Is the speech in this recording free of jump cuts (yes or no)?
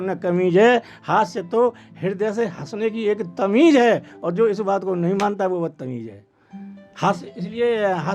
yes